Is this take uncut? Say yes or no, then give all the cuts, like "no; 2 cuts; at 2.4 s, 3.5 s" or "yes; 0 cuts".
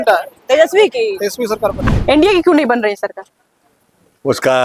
no; 1 cut; at 1.8 s